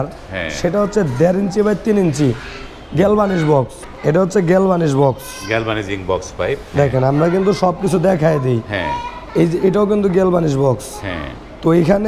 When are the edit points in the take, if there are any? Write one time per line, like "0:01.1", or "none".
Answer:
0:03.8